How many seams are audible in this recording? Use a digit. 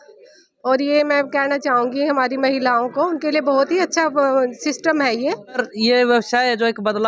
1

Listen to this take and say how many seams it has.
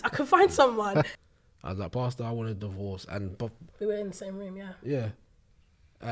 1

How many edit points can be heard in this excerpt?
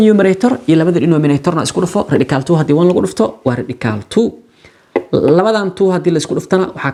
0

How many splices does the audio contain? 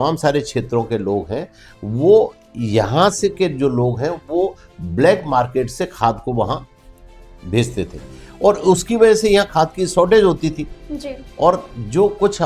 0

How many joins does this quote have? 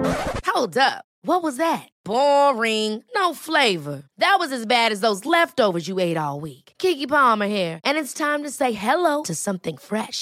0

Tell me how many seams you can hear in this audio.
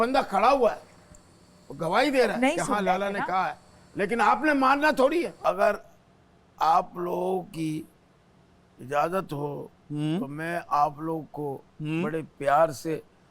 1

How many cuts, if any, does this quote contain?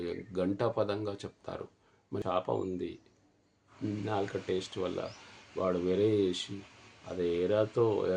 1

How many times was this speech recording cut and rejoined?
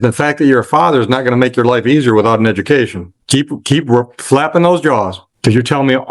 1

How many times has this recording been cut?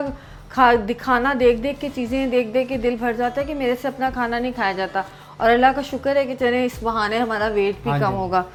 0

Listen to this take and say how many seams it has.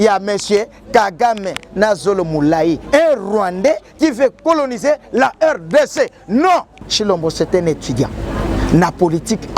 1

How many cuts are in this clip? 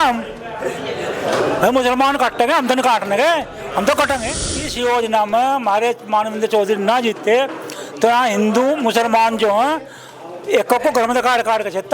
1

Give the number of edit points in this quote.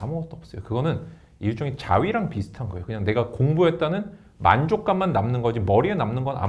0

